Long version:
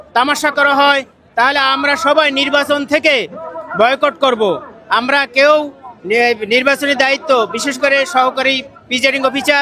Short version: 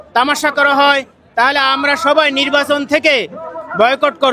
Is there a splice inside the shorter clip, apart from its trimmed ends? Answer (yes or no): no